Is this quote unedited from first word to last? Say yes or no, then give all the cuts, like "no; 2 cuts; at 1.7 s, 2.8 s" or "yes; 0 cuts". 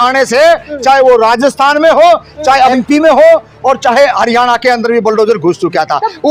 no; 1 cut; at 2.7 s